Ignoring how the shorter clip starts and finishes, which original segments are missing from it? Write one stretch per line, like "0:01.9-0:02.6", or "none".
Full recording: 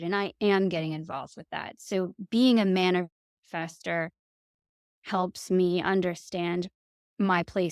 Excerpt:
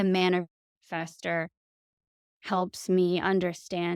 none